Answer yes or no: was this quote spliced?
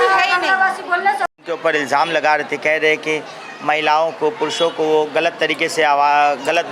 yes